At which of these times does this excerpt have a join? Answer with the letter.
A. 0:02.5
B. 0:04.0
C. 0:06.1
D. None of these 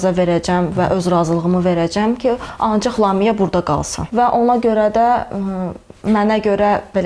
B